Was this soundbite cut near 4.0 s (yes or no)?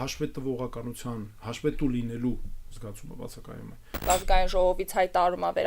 yes